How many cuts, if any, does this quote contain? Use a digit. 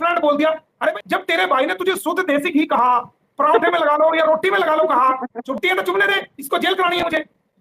2